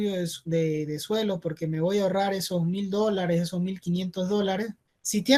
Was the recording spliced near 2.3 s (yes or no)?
no